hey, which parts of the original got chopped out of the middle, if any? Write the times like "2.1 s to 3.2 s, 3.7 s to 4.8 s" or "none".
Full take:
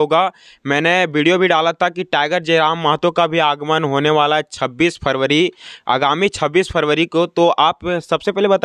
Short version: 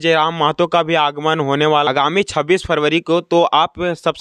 4.3 s to 5.9 s